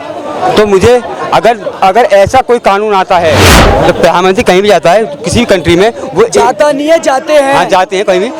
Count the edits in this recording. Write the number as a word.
one